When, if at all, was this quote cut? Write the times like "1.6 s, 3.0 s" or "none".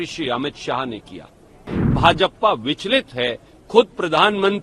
1.8 s

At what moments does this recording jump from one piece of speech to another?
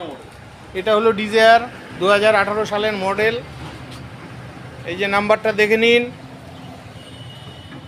none

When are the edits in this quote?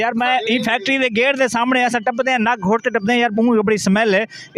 none

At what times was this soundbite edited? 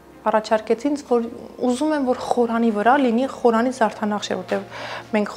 none

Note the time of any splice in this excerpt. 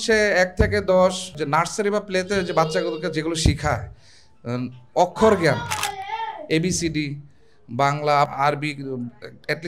8.3 s

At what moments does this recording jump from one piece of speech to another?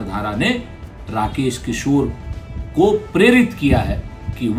none

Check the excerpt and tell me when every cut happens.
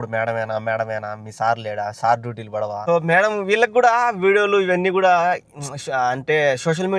2.8 s

